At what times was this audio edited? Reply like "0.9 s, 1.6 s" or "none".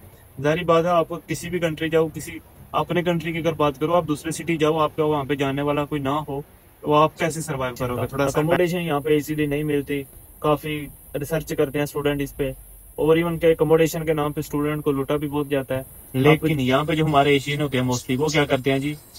8.3 s, 16.0 s